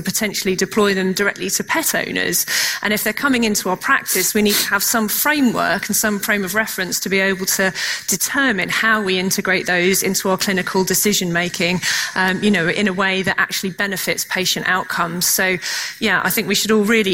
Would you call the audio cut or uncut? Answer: uncut